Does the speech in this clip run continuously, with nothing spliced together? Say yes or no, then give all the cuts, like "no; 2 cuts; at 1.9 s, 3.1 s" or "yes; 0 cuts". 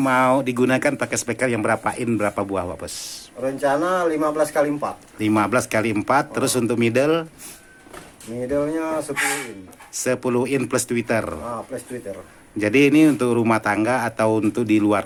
yes; 0 cuts